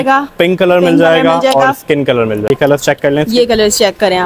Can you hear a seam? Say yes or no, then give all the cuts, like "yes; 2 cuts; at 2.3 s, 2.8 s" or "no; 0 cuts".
yes; 1 cut; at 2.4 s